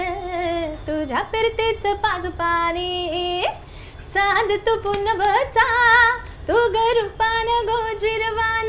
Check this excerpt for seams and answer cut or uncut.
uncut